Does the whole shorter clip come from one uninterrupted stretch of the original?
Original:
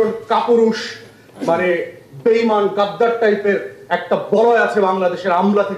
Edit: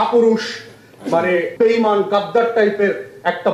no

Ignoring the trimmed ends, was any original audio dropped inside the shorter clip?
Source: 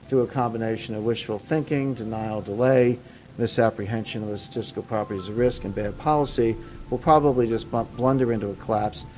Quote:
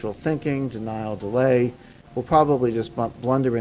yes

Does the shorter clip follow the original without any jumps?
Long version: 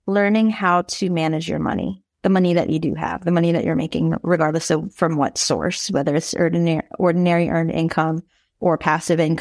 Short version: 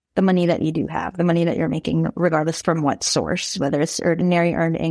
no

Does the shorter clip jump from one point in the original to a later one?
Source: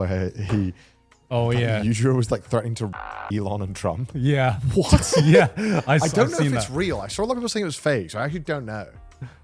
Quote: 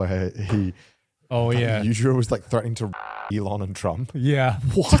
no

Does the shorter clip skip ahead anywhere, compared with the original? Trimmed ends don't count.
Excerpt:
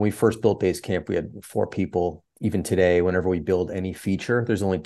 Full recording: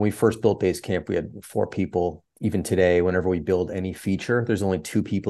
no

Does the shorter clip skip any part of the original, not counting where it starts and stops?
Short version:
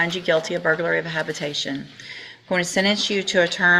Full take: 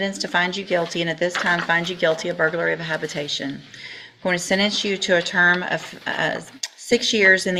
no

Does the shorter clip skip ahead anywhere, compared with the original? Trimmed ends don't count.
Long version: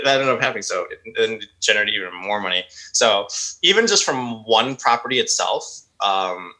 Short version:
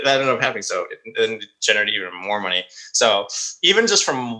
no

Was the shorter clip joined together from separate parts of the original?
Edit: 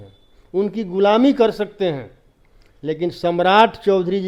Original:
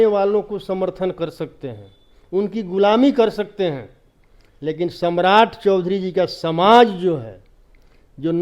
no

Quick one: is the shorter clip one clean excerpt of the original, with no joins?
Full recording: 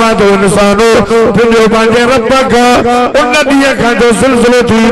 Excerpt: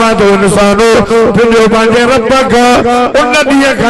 yes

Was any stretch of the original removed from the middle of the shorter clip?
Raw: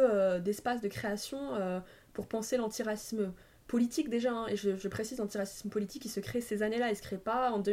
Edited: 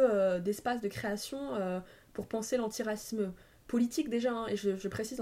no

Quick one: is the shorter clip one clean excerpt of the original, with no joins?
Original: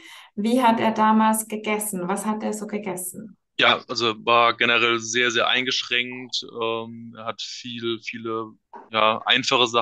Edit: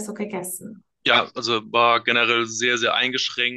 yes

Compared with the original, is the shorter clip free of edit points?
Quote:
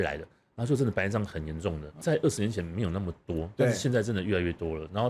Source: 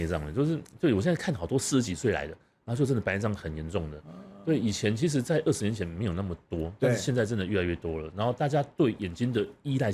no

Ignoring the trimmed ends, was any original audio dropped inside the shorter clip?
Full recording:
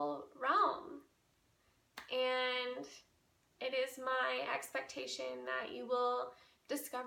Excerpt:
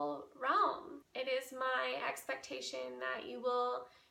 yes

